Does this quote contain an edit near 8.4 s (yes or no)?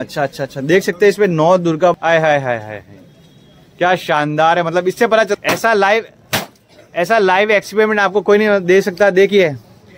no